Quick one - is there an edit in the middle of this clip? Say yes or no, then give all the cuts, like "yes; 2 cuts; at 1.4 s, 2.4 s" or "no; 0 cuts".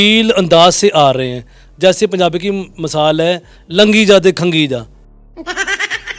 no; 0 cuts